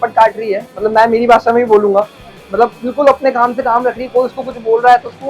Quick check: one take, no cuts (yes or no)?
yes